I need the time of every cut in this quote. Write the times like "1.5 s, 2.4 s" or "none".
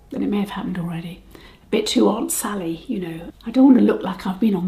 3.1 s